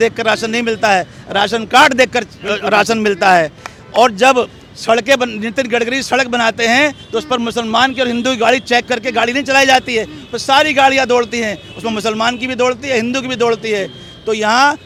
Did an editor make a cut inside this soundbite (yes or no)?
no